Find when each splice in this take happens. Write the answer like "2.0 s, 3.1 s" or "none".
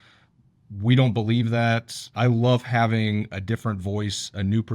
2.1 s